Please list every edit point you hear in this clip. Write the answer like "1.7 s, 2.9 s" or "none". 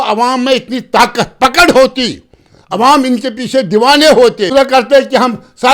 4.5 s